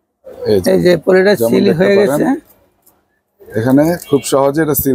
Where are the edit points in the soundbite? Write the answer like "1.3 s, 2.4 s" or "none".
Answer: none